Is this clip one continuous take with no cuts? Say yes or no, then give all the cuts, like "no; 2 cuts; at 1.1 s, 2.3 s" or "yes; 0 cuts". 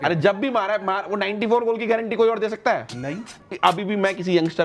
no; 1 cut; at 3.3 s